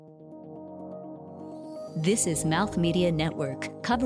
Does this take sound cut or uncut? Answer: uncut